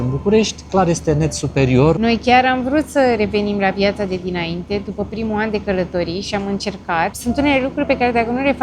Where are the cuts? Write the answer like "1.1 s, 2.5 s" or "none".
2.0 s, 7.2 s